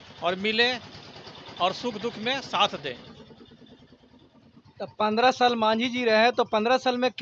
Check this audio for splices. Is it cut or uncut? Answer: uncut